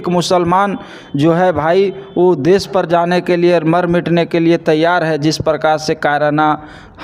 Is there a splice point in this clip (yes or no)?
no